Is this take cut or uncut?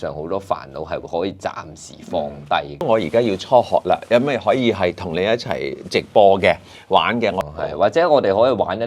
cut